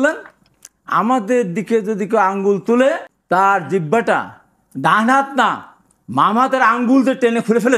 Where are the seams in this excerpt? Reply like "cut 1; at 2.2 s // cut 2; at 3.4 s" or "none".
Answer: cut 1; at 3.1 s